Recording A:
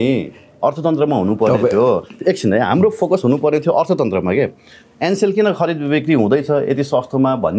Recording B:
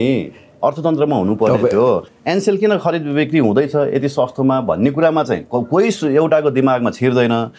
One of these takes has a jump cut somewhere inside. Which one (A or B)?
B